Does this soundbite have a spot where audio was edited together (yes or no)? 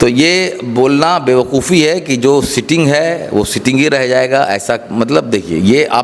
no